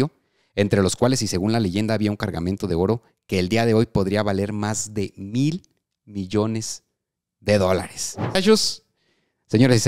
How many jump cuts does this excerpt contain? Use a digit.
1